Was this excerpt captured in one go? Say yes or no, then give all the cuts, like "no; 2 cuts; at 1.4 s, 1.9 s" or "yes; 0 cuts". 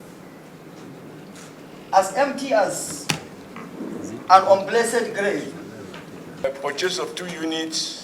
no; 1 cut; at 6.4 s